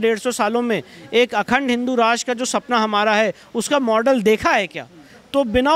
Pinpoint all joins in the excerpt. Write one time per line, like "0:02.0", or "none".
none

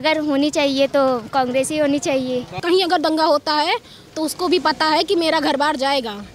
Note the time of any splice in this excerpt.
0:02.6

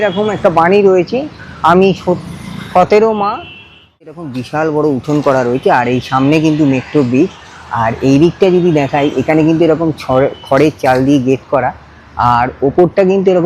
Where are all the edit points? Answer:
0:04.0

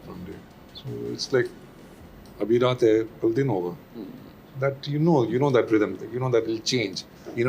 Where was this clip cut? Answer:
none

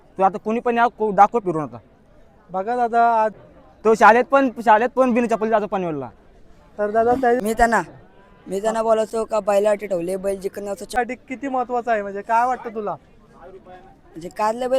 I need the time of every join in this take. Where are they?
0:03.4
0:07.4
0:11.0

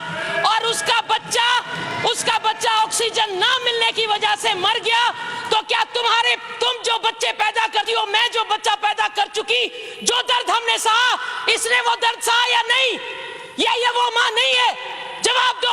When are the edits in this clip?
none

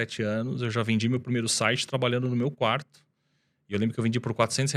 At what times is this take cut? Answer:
none

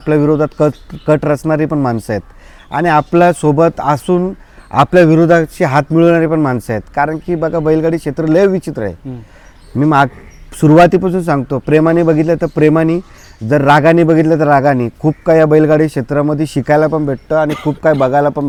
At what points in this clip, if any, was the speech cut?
none

